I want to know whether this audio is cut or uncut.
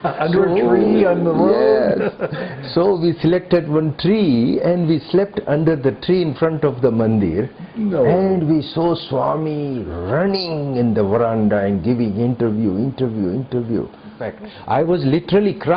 cut